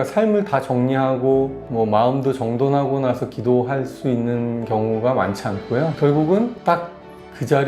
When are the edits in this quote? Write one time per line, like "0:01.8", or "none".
none